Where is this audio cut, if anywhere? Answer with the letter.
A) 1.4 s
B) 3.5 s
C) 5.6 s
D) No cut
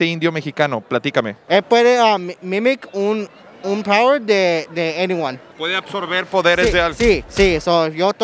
A